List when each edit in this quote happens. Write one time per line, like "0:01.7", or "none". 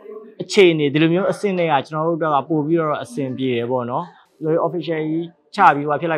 0:04.2

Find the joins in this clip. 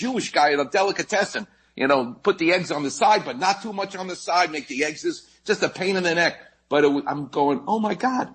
0:05.0

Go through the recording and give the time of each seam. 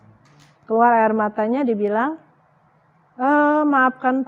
none

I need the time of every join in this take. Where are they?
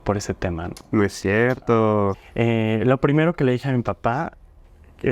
0:02.1

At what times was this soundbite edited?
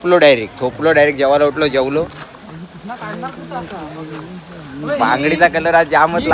none

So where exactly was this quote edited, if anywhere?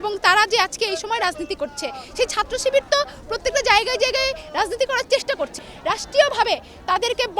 0:02.0
0:05.6

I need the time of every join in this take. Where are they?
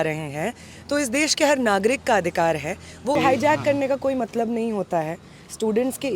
0:03.1

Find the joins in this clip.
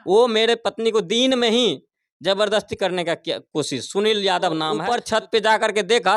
0:04.8

